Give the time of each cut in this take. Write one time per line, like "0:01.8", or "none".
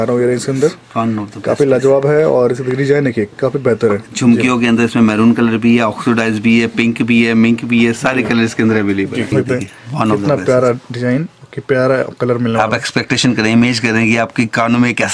0:09.3